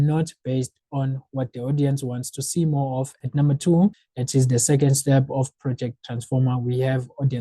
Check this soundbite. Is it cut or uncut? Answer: cut